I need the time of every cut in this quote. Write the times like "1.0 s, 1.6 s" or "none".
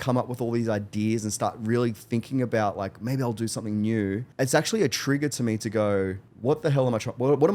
4.3 s, 6.2 s